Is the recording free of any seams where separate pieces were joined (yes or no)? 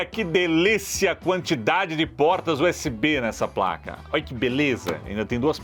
yes